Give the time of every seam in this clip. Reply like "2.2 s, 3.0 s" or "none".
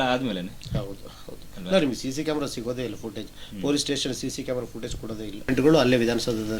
5.5 s